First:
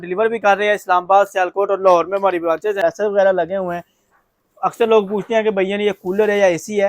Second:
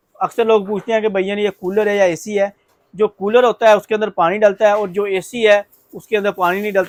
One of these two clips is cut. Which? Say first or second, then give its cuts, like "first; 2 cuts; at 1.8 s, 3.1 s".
first; 1 cut; at 2.8 s